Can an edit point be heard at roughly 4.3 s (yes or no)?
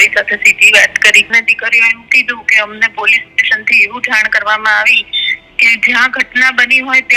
no